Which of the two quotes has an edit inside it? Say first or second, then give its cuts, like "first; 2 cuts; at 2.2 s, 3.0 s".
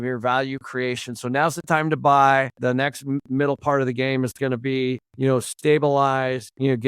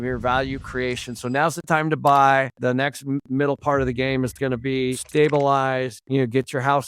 second; 1 cut; at 5.0 s